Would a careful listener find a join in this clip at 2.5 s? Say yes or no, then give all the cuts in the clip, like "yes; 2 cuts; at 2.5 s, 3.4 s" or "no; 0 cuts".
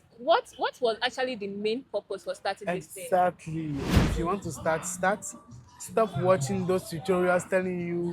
no; 1 cut; at 3.8 s